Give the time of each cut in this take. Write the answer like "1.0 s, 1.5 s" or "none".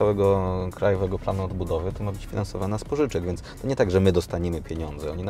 none